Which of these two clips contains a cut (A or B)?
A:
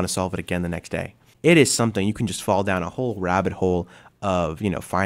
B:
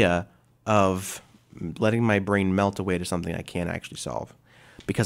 A